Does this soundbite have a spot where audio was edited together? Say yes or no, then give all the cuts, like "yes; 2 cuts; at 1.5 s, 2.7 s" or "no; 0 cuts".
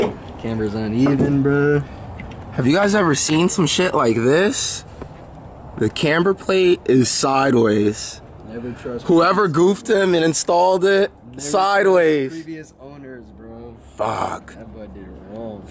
no; 0 cuts